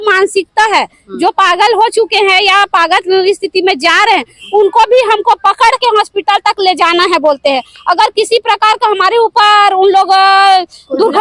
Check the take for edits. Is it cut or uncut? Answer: uncut